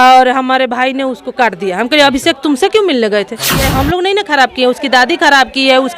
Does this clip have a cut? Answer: yes; 1 cut; at 3.6 s

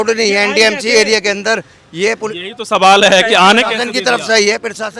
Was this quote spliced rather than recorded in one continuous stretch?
no; 0 cuts

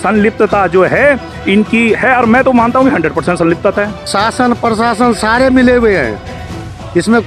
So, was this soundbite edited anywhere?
yes; 1 cut; at 4.0 s

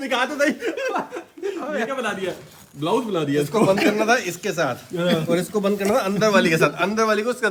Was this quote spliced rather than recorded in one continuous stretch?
no; 0 cuts

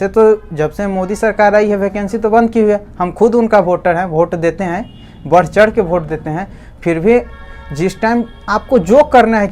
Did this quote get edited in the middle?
no; 0 cuts

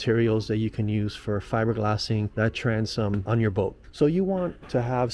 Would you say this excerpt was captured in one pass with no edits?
no; 2 cuts; at 2.3 s, 3.8 s

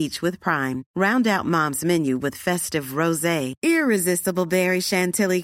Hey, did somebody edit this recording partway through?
no; 0 cuts

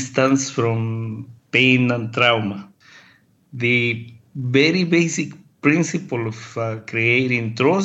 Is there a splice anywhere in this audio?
yes; 1 cut; at 2.7 s

